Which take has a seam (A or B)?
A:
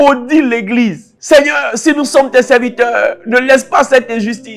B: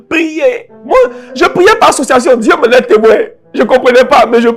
A